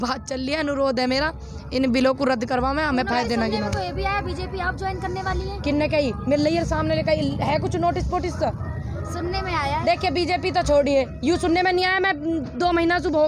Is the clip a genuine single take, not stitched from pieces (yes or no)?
yes